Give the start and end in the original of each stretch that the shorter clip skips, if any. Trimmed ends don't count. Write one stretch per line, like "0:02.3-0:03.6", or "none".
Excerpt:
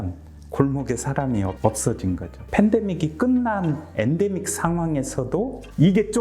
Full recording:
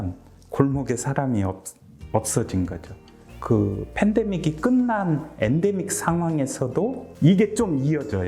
0:01.6-0:02.1
0:02.9-0:03.8